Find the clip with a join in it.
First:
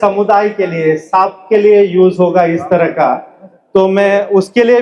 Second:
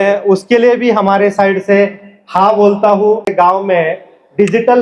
second; 1 cut; at 3.3 s

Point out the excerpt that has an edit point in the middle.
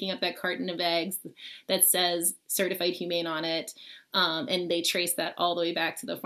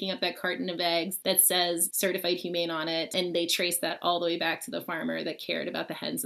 second; 2 cuts; at 1.7 s, 3.1 s

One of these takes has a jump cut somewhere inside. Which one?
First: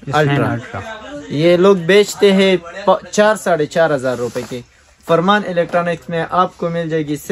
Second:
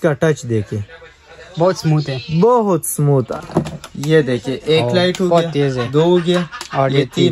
second; 1 cut; at 3.3 s

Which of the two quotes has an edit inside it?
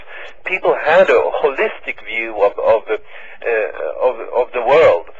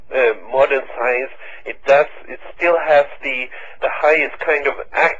first; 1 cut; at 1.2 s

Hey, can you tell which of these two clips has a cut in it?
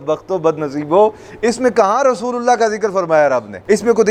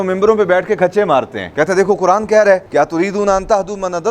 second; 1 cut; at 1.4 s

